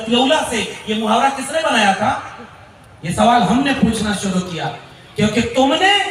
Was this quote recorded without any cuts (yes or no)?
yes